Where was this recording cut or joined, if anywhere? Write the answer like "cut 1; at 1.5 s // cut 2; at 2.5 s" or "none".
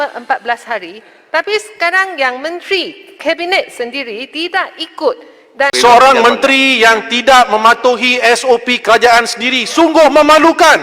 cut 1; at 5.7 s